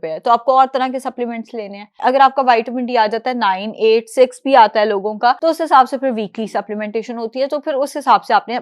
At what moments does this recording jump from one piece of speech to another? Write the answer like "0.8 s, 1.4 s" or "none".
1.9 s, 5.4 s